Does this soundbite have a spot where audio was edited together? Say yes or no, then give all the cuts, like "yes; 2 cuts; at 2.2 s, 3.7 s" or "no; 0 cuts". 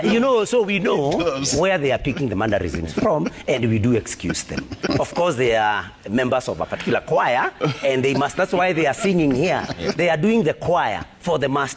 no; 0 cuts